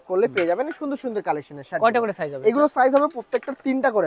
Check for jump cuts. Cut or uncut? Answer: uncut